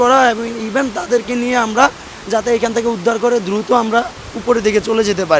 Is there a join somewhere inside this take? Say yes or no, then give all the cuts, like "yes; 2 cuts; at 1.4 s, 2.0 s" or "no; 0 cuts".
no; 0 cuts